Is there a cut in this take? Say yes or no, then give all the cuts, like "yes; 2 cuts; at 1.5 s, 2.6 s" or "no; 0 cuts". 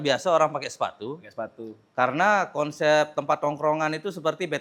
no; 0 cuts